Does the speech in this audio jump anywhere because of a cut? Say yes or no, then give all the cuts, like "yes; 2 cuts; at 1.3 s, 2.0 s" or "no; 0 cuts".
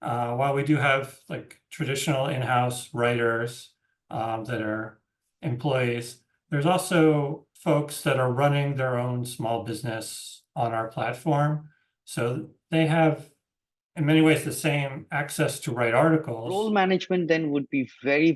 yes; 2 cuts; at 7.5 s, 16.6 s